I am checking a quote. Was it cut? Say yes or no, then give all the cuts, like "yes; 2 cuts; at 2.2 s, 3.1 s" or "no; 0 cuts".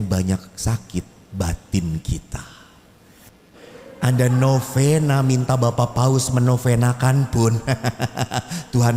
yes; 1 cut; at 3.5 s